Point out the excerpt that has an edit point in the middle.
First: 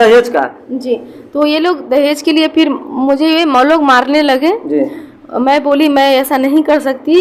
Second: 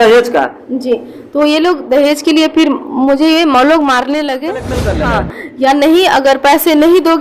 second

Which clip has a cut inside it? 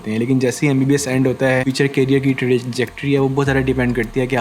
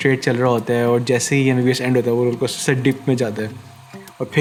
first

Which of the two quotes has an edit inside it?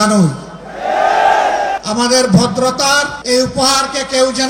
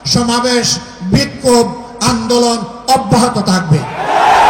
first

